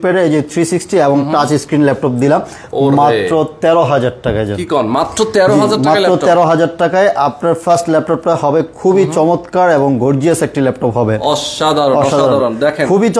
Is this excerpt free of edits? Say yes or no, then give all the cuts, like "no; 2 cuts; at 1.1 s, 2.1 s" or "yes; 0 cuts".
yes; 0 cuts